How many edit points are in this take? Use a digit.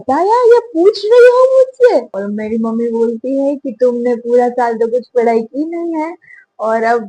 1